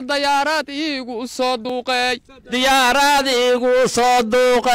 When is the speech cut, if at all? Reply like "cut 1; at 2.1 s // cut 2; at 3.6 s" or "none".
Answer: cut 1; at 1.7 s